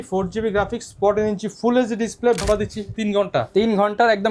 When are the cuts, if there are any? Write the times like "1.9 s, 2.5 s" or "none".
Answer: 2.4 s

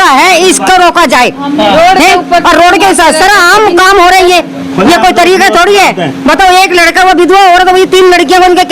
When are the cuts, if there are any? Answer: none

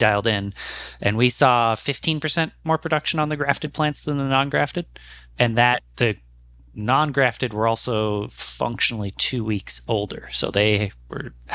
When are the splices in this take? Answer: none

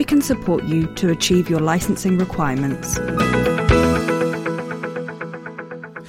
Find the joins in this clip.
3.0 s

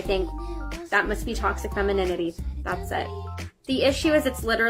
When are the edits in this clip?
3.1 s

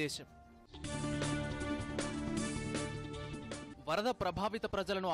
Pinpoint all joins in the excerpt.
none

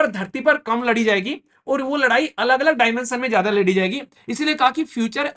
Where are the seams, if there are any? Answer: none

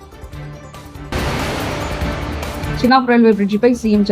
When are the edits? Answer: 1.0 s, 2.8 s

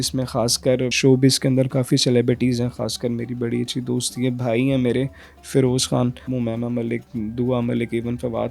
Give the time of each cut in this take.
0.9 s, 6.3 s

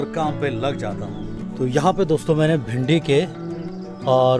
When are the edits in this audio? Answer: 1.4 s

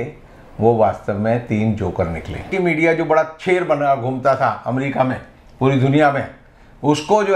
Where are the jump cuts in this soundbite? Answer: 2.5 s

